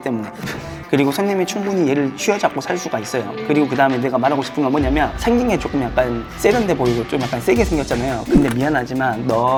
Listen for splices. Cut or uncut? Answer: uncut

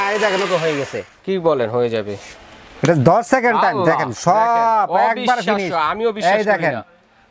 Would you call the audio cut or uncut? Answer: uncut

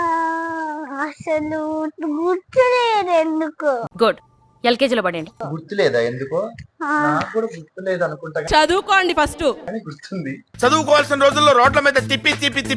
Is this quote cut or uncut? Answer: uncut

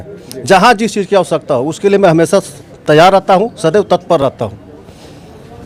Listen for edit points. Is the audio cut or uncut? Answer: uncut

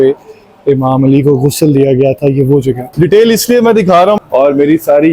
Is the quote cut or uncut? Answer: cut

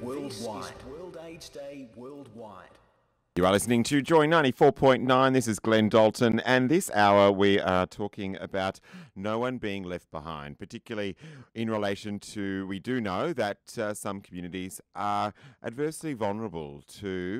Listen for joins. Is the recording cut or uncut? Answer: cut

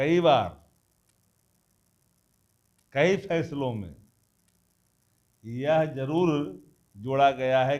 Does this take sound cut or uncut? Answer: uncut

